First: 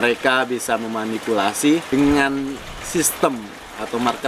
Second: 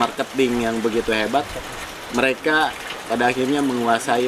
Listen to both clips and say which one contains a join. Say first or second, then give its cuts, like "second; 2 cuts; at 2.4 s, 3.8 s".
first; 1 cut; at 1.9 s